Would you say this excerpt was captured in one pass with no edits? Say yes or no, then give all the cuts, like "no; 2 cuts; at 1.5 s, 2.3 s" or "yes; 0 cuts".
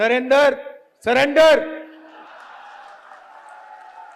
no; 1 cut; at 2.3 s